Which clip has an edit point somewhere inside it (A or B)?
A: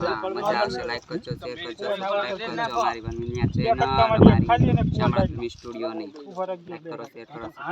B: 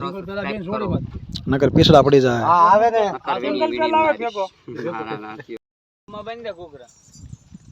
B